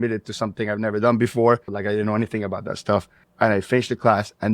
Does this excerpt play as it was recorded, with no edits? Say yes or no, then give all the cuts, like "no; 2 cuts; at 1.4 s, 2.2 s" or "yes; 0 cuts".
no; 1 cut; at 1.7 s